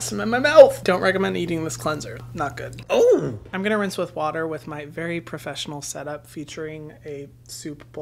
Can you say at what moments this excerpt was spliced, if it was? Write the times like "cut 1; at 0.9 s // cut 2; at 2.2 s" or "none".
cut 1; at 3.4 s